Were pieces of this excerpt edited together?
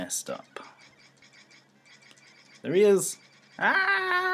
yes; 1 cut; at 1.2 s

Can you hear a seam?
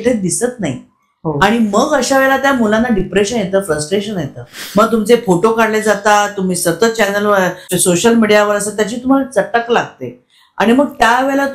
yes; 2 cuts; at 4.5 s, 7.7 s

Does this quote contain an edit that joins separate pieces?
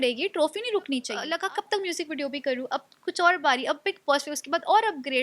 yes; 1 cut; at 1.2 s

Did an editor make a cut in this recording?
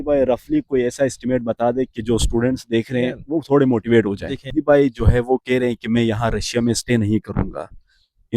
yes; 1 cut; at 4.4 s

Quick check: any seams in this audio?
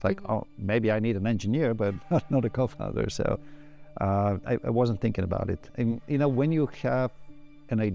no; 0 cuts

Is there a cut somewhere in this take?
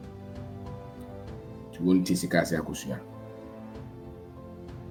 no; 0 cuts

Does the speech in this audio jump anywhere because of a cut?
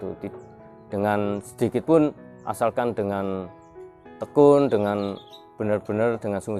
no; 0 cuts

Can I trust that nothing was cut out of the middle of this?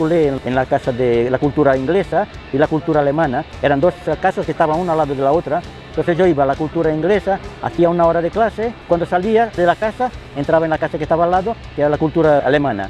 yes; 0 cuts

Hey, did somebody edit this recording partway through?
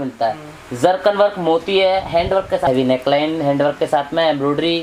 yes; 1 cut; at 2.7 s

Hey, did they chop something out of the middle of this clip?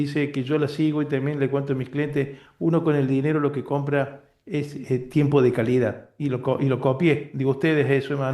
no; 0 cuts

